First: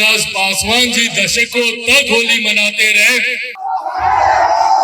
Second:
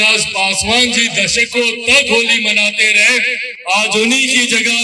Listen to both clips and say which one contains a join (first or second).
first